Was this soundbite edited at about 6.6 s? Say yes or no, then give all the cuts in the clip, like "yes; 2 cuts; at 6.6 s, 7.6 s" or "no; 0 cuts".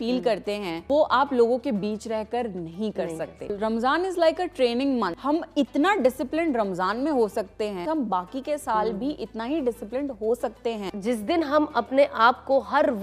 no; 5 cuts; at 0.8 s, 3.5 s, 5.2 s, 7.8 s, 10.9 s